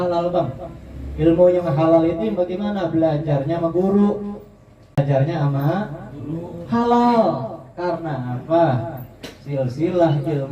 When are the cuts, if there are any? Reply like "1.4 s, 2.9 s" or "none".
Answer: 5.0 s